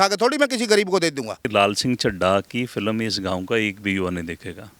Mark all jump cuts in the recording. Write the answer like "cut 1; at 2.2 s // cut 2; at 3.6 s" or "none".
cut 1; at 1.4 s